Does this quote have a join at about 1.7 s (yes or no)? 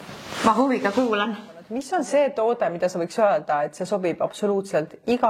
yes